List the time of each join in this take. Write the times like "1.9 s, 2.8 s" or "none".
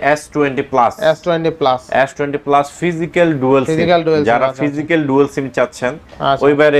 none